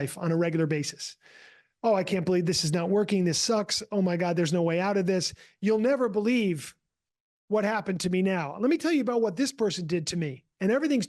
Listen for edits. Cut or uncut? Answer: uncut